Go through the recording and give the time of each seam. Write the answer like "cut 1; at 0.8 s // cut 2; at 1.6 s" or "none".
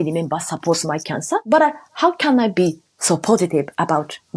cut 1; at 1.4 s

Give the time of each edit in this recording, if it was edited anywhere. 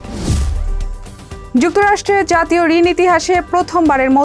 cut 1; at 1.0 s

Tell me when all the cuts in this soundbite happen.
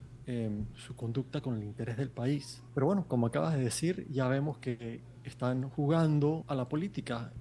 cut 1; at 2.6 s // cut 2; at 6.4 s

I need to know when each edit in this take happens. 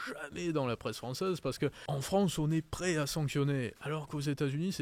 cut 1; at 1.8 s

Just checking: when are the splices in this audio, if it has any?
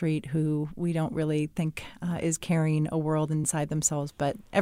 cut 1; at 3.5 s

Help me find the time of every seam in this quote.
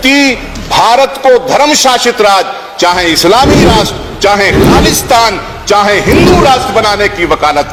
none

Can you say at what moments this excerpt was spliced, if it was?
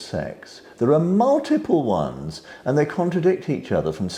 none

